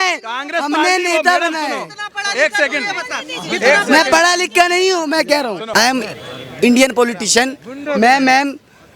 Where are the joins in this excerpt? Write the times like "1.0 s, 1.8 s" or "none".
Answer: 5.6 s